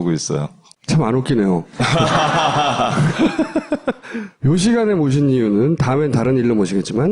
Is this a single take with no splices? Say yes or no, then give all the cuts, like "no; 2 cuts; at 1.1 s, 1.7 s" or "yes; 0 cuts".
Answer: yes; 0 cuts